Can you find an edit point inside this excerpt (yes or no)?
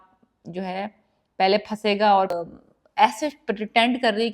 yes